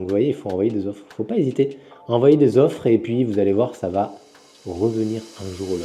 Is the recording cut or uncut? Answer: uncut